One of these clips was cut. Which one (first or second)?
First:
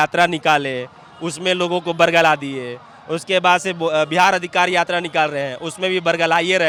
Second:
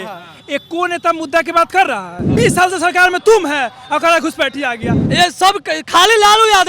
second